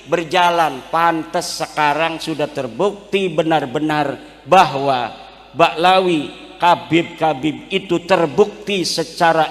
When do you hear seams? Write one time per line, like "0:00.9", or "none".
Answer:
none